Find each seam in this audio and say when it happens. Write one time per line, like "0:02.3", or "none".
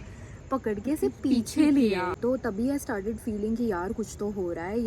0:02.2